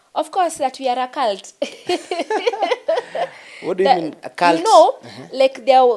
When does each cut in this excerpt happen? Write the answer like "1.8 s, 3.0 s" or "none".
none